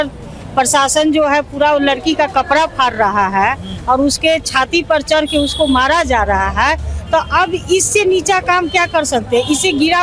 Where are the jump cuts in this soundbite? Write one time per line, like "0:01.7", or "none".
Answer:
none

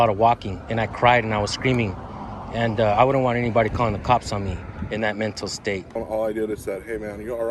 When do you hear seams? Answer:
0:06.0

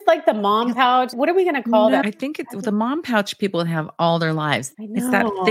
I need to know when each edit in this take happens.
0:01.1
0:02.0
0:04.7

